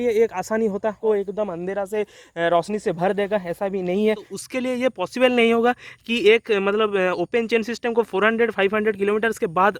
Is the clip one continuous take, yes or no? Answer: no